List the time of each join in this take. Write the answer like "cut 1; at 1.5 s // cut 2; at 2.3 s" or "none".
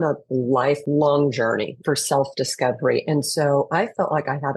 cut 1; at 0.8 s // cut 2; at 1.8 s